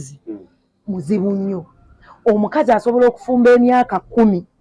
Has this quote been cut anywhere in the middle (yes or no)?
no